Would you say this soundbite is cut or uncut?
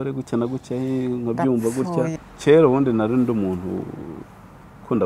cut